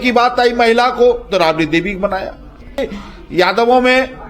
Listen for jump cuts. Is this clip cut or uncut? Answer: cut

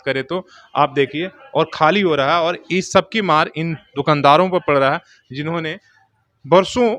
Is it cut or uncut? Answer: uncut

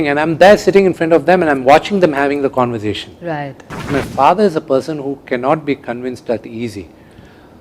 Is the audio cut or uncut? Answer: cut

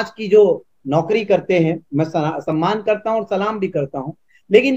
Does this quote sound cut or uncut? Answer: cut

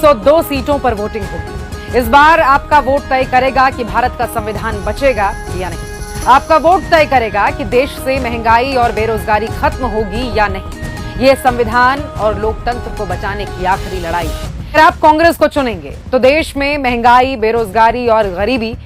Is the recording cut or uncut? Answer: cut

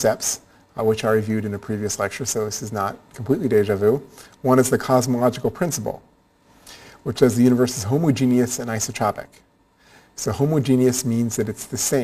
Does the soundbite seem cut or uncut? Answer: uncut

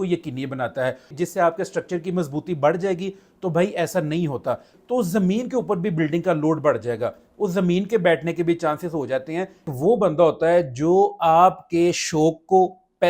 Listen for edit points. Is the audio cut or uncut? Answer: cut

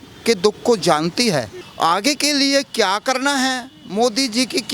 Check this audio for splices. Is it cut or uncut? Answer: cut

